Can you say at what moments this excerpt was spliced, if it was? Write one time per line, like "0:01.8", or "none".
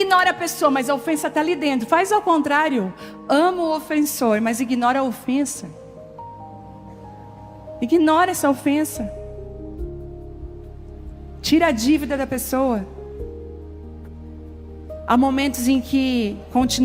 0:05.5
0:07.2
0:13.2
0:15.1